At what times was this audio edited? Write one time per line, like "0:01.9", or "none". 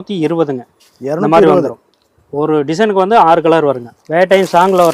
0:03.9